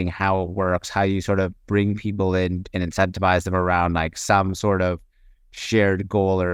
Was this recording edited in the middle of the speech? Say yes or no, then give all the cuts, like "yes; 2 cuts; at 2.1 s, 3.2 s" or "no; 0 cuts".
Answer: no; 0 cuts